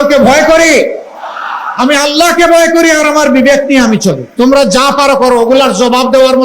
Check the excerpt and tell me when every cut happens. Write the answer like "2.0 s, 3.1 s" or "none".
4.2 s